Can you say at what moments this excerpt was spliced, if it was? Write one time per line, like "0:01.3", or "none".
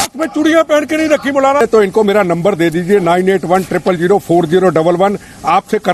0:01.6